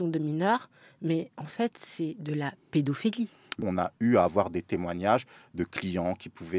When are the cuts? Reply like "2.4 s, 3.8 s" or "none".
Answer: 3.6 s

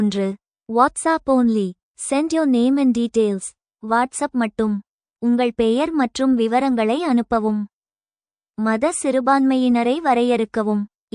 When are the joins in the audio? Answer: 8.4 s

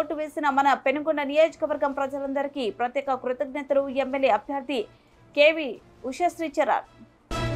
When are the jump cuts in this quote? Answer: none

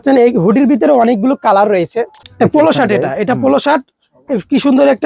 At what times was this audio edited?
2.2 s

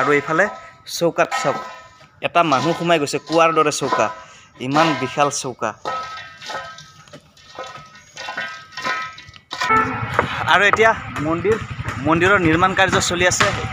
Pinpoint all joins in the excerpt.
9.7 s

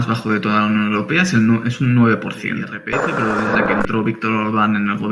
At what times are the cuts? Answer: 2.8 s

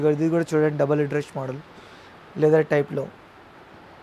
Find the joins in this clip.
none

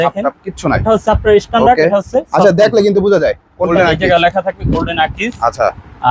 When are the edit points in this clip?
3.7 s

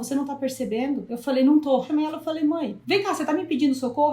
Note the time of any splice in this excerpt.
1.1 s, 1.9 s, 2.8 s

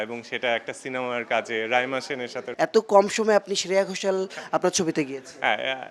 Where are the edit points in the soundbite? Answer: 2.4 s

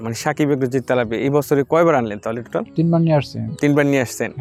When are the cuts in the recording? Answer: none

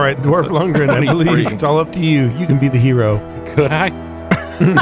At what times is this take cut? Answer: 1.6 s

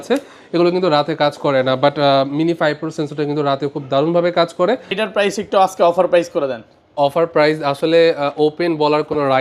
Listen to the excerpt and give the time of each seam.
5.0 s

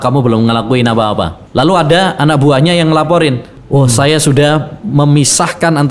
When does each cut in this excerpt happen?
1.4 s, 3.5 s

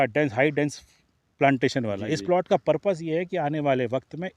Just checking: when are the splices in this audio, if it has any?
none

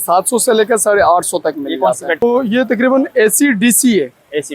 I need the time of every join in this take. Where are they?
2.2 s

